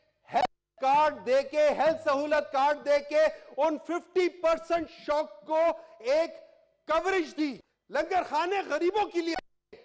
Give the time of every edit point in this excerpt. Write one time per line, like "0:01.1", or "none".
0:07.7

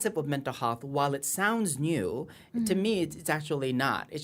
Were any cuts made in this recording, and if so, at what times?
none

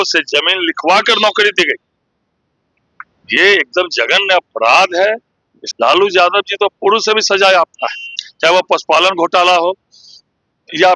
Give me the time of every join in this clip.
0:05.6

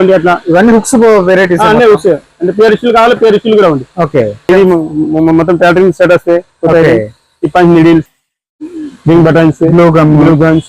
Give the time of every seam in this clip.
0:04.4

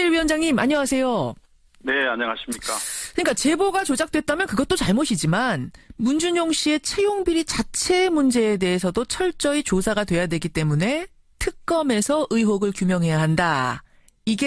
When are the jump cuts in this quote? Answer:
0:08.9

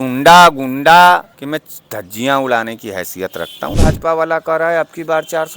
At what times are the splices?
0:01.3
0:03.7

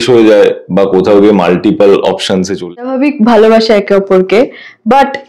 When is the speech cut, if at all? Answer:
0:02.6

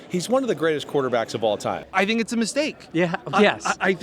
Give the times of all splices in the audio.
0:01.8

